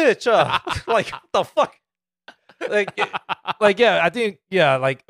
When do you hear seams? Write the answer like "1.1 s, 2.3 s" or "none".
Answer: none